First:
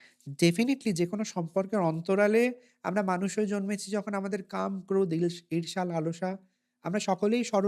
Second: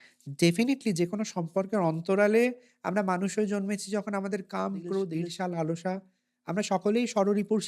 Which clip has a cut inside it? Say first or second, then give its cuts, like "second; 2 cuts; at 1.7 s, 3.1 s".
second; 1 cut; at 5.1 s